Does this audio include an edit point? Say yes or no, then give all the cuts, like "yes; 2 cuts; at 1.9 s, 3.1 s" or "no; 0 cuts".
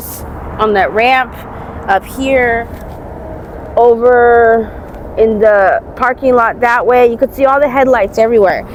no; 0 cuts